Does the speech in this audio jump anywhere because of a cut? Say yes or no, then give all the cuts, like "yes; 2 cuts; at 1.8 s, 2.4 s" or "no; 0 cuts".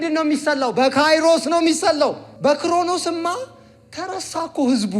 yes; 1 cut; at 2.3 s